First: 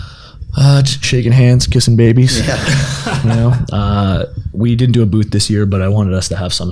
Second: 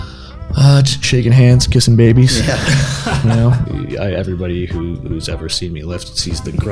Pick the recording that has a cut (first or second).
second